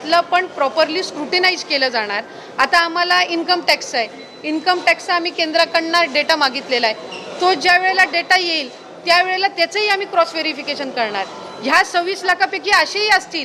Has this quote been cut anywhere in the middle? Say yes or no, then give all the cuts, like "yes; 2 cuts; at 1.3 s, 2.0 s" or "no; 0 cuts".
no; 0 cuts